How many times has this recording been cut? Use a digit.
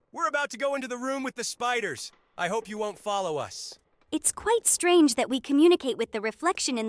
0